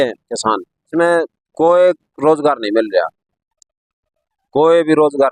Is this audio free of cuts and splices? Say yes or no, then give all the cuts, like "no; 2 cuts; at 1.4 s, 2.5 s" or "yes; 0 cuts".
no; 1 cut; at 0.9 s